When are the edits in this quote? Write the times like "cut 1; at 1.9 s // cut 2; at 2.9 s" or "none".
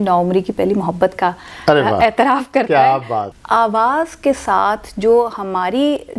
cut 1; at 3.3 s